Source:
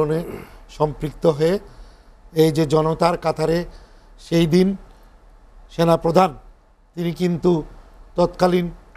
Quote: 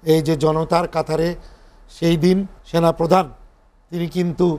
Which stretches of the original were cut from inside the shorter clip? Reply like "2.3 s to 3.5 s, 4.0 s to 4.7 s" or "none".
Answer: 4.9 s to 5.6 s